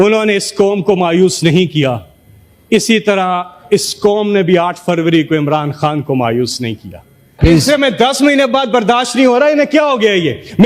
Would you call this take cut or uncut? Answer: cut